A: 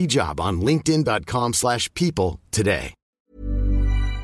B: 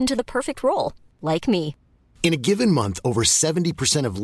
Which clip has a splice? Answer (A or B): A